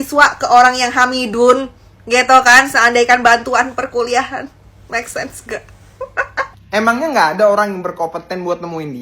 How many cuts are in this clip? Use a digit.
1